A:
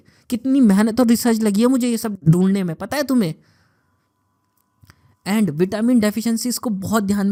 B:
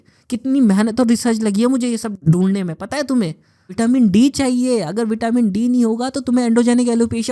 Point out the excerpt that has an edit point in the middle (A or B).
B